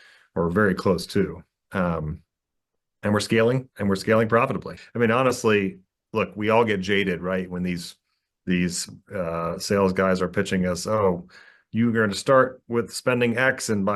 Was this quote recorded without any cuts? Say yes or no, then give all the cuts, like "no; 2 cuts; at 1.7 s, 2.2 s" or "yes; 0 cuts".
no; 1 cut; at 4.8 s